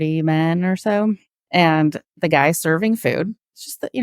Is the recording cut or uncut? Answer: cut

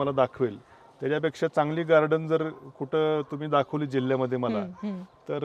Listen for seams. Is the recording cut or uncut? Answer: uncut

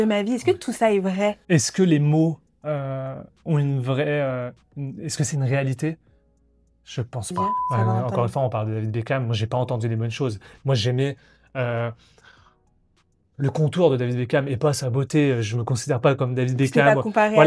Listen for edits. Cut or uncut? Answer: cut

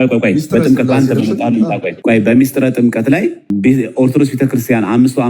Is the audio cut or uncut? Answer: cut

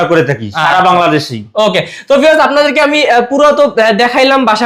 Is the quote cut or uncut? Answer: uncut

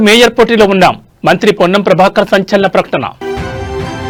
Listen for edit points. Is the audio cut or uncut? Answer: uncut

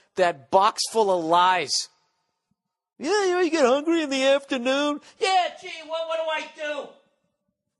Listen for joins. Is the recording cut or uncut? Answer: uncut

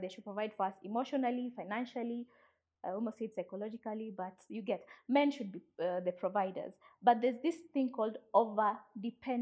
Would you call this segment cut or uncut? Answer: uncut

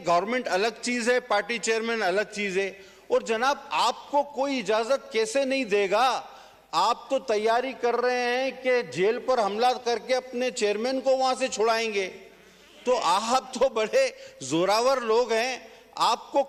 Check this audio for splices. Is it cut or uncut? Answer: uncut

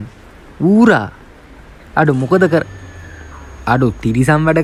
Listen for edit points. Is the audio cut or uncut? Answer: uncut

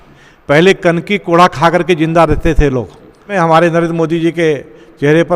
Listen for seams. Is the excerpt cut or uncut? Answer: cut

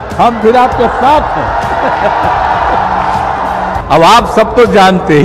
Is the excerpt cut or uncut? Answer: cut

